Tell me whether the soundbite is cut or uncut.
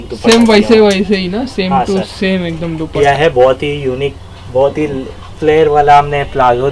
cut